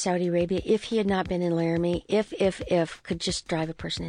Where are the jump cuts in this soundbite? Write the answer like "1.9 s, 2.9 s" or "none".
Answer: none